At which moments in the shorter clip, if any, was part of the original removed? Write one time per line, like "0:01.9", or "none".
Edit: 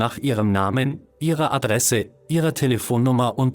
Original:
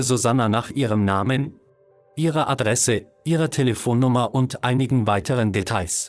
0:01.1